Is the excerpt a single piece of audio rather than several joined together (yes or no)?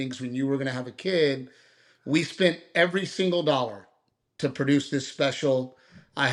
yes